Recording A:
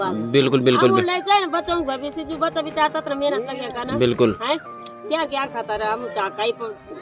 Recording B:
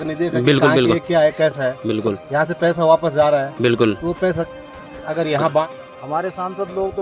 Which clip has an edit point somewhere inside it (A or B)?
B